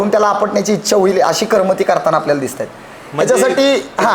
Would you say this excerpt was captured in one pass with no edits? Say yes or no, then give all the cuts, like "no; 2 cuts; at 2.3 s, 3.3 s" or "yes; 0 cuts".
yes; 0 cuts